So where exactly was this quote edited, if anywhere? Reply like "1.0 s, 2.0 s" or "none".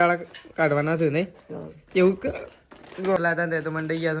3.2 s